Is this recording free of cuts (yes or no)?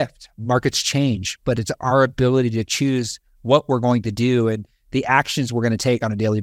yes